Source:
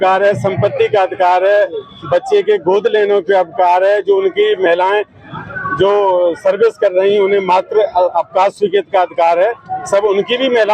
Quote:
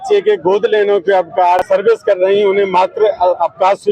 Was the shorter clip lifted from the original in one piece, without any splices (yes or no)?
no